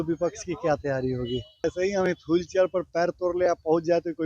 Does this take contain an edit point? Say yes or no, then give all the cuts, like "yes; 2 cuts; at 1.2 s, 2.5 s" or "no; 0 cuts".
yes; 1 cut; at 1.6 s